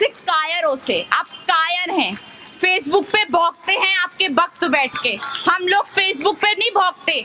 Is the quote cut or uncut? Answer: uncut